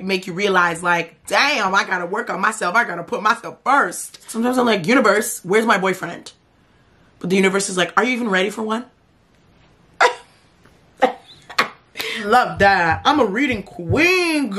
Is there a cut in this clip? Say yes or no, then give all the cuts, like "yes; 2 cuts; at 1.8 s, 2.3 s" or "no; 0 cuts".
yes; 2 cuts; at 4.3 s, 12.2 s